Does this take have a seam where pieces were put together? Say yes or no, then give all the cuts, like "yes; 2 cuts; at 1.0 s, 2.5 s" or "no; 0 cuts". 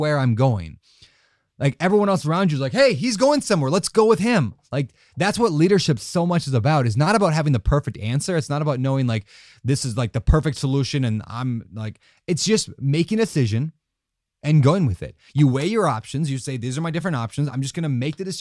no; 0 cuts